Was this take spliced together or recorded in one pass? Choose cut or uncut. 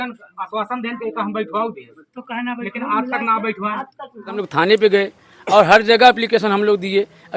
cut